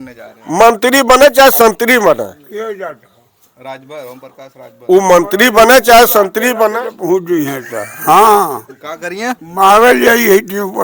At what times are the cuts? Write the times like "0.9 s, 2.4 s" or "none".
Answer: none